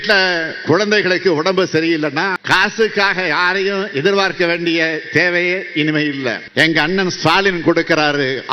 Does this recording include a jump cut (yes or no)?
yes